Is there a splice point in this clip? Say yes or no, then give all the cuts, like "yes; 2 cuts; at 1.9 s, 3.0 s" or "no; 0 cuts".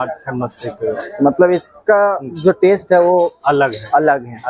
no; 0 cuts